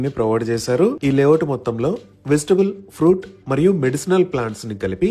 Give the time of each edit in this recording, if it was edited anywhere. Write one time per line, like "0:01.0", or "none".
0:01.0